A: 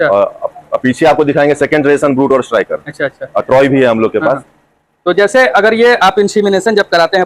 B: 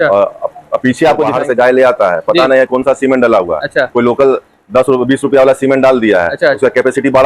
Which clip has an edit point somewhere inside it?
B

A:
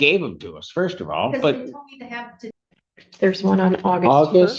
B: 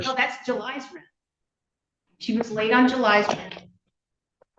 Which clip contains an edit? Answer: A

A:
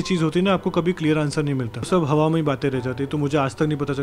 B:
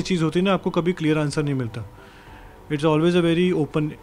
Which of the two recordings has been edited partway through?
A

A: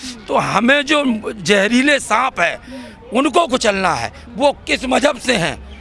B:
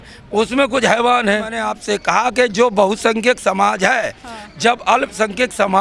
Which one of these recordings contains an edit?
B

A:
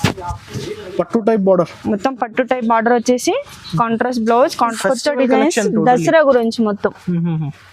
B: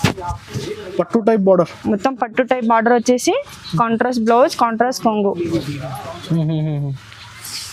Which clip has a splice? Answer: A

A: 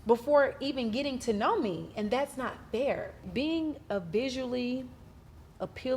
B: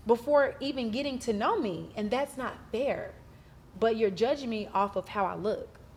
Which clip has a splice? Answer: A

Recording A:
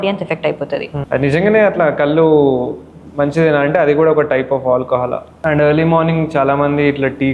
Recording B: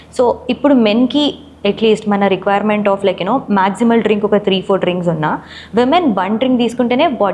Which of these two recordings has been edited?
A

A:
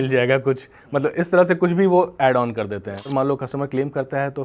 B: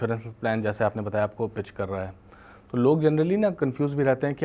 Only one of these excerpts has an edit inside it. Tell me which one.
A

